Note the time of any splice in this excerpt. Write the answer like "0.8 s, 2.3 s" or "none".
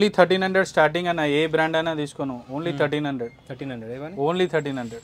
none